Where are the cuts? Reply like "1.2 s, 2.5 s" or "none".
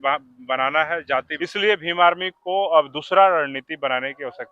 1.3 s